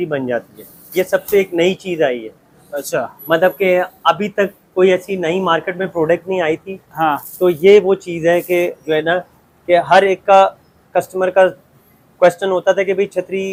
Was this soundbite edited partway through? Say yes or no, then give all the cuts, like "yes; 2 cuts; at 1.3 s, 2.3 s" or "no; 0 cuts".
no; 0 cuts